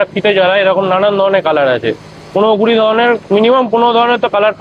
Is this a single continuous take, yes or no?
yes